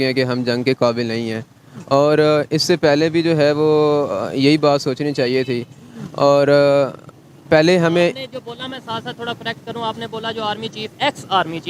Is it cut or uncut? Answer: uncut